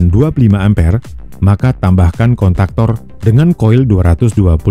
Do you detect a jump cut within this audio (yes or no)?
yes